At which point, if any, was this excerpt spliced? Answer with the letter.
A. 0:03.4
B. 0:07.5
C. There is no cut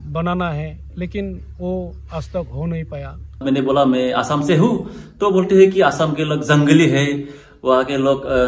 A